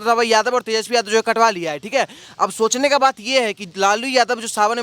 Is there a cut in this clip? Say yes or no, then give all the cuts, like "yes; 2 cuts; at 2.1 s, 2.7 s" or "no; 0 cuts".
no; 0 cuts